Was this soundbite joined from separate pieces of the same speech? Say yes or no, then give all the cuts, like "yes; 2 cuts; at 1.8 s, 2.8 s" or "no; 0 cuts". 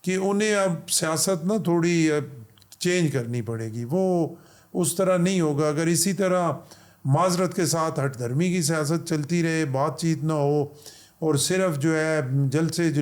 no; 0 cuts